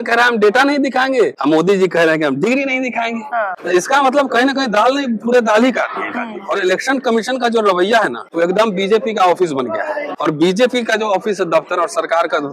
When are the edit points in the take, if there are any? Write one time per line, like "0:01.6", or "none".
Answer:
0:01.4
0:03.6
0:06.3
0:08.2
0:10.1